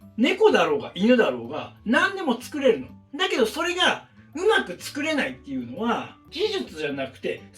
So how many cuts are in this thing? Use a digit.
1